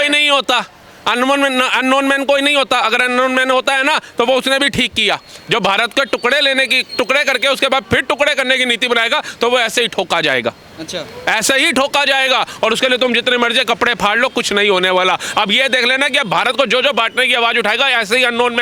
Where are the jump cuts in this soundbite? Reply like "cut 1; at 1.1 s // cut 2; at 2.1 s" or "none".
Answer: none